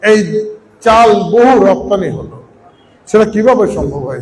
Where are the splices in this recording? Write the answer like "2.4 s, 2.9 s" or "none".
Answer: none